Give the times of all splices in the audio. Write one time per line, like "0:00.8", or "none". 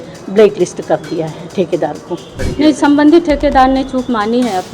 0:02.4